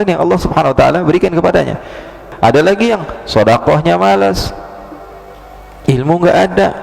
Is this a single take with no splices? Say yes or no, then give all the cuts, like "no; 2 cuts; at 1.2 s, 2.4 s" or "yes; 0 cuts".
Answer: no; 1 cut; at 2.2 s